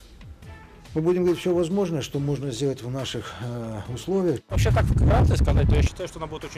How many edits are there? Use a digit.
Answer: 1